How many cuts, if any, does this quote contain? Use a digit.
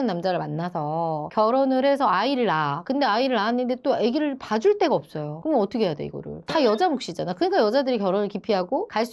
0